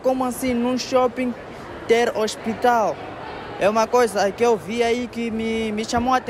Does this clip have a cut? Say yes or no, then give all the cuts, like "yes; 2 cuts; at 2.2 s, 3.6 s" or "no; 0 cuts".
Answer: no; 0 cuts